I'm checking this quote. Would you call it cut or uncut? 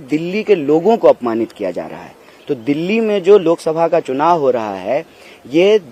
uncut